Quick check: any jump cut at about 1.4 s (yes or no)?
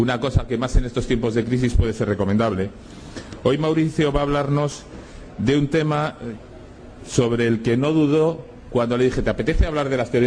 yes